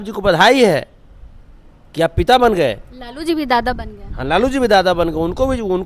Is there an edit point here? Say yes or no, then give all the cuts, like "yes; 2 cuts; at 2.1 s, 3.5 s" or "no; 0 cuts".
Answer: no; 0 cuts